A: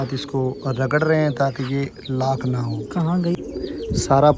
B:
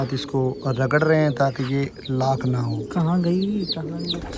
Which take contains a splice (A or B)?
A